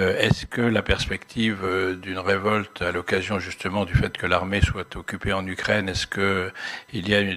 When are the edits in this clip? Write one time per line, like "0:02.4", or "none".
none